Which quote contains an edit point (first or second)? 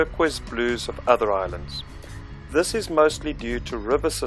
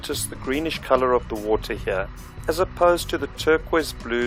second